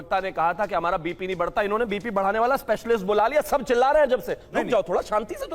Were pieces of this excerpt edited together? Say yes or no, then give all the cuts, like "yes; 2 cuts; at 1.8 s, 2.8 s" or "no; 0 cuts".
no; 0 cuts